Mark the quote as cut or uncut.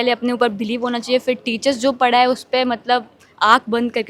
uncut